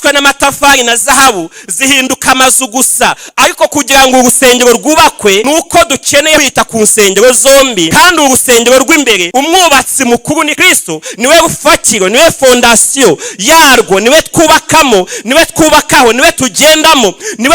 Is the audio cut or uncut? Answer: cut